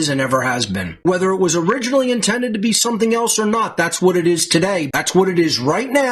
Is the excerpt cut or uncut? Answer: cut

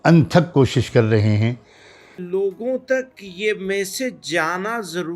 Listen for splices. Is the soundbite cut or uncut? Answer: cut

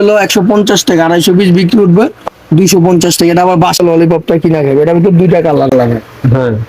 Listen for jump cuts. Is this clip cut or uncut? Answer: cut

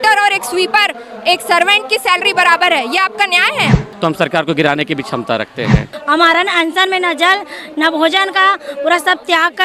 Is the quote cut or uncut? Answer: cut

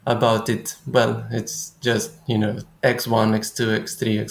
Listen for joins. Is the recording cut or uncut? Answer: uncut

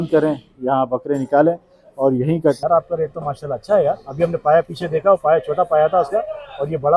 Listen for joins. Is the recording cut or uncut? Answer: cut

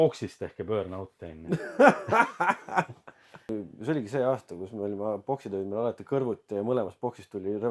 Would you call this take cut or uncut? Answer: cut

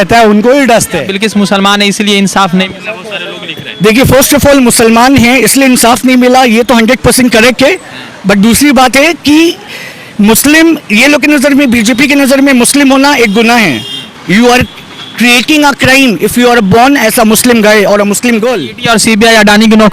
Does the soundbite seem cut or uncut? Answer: cut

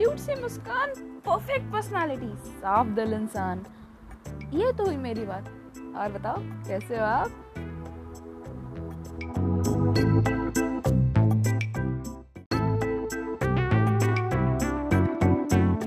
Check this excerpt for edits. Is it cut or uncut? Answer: cut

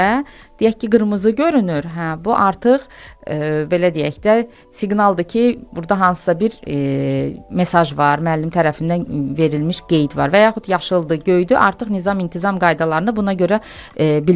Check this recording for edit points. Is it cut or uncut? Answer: uncut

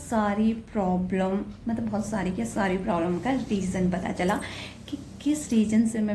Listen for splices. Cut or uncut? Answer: uncut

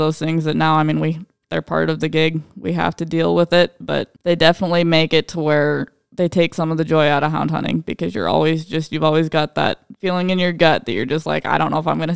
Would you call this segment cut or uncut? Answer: cut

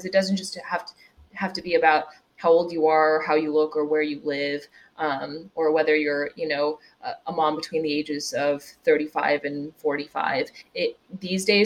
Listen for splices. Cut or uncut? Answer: uncut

